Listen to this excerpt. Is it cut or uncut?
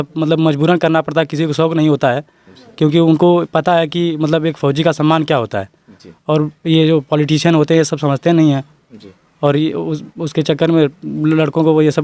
uncut